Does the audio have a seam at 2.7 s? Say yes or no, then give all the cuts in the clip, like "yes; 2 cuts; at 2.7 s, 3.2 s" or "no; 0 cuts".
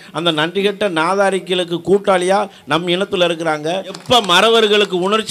no; 1 cut; at 4.0 s